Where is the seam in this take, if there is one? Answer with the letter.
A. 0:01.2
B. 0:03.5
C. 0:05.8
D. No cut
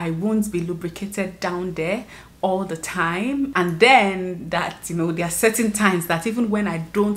B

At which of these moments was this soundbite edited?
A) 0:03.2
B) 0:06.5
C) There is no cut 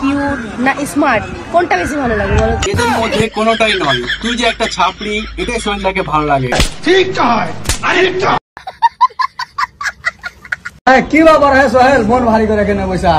B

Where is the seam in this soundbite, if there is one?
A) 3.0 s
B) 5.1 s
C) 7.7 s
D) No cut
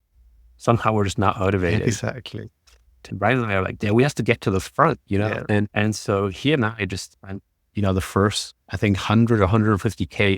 A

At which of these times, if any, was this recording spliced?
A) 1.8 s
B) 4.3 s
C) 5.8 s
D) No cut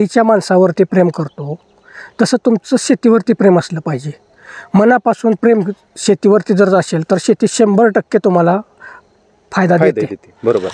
D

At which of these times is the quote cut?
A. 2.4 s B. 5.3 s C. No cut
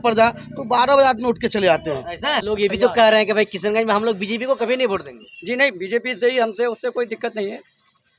A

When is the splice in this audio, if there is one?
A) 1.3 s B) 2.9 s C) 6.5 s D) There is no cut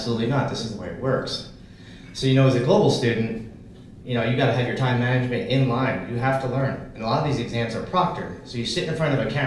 A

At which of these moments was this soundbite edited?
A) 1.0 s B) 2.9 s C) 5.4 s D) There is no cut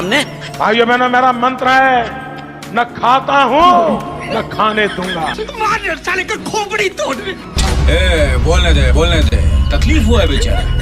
C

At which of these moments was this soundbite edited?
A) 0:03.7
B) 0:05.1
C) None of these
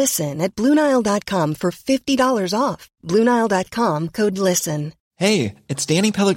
C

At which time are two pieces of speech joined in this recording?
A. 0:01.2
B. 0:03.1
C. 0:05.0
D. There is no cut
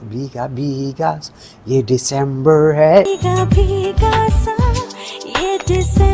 B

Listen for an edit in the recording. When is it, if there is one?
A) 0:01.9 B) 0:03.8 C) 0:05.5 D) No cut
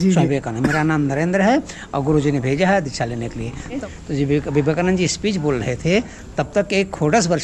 B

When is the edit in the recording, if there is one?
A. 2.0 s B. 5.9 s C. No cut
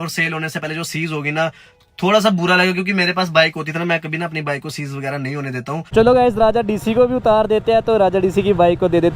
B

